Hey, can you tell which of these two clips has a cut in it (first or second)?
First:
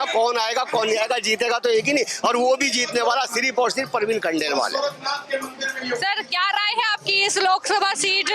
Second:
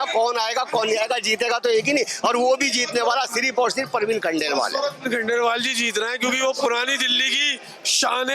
second